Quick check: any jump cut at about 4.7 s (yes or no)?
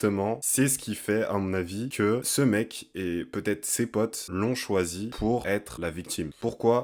no